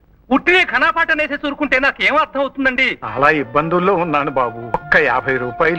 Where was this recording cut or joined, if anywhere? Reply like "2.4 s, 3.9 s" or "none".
3.0 s, 4.8 s